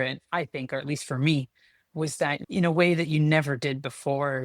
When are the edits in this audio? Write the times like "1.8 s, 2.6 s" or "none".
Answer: 2.4 s